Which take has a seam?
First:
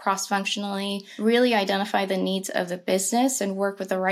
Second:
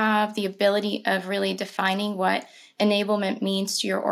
first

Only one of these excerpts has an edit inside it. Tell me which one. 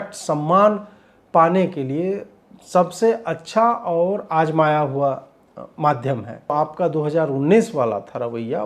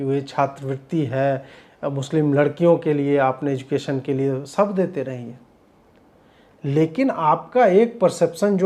first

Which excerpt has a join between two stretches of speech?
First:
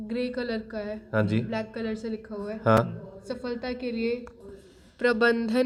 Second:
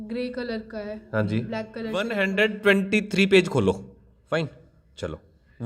second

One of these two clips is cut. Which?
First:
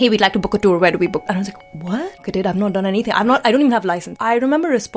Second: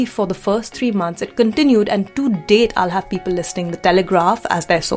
first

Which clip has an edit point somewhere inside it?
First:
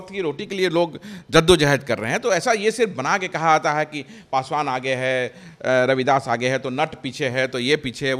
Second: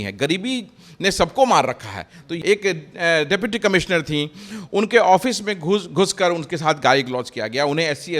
second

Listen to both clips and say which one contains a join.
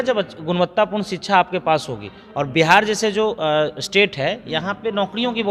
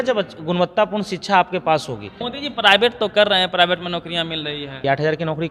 second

